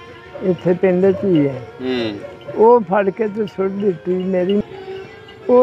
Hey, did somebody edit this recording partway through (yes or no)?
yes